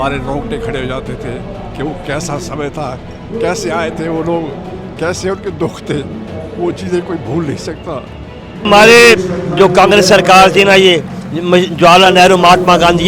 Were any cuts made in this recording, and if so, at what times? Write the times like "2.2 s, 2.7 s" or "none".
8.7 s

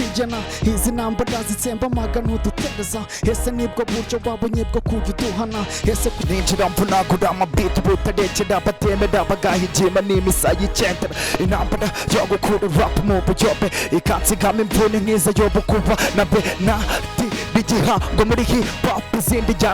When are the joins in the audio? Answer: 6.2 s

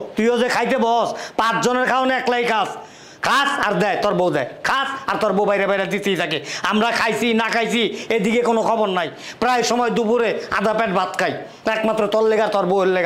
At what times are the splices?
none

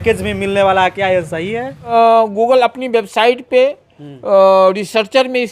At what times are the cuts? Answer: 1.9 s

